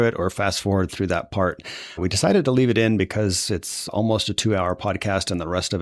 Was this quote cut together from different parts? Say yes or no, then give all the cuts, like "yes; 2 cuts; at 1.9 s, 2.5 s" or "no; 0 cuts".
yes; 2 cuts; at 2.0 s, 3.9 s